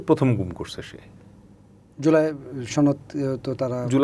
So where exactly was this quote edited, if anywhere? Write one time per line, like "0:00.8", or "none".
none